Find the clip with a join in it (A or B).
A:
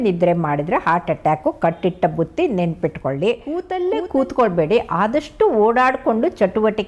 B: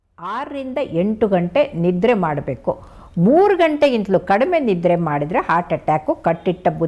A